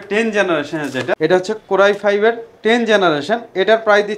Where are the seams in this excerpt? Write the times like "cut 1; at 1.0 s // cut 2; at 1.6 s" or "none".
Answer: cut 1; at 1.2 s